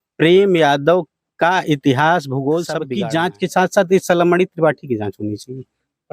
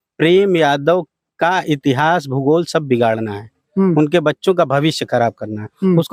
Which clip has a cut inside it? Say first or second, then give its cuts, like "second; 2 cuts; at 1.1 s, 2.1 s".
first; 1 cut; at 2.8 s